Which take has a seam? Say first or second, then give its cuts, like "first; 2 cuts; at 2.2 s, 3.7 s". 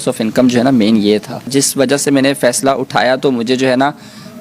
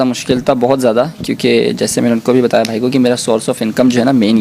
first; 1 cut; at 1.9 s